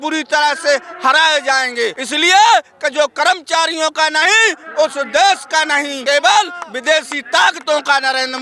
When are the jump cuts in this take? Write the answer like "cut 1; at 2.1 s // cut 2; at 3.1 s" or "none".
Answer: cut 1; at 2.0 s // cut 2; at 5.9 s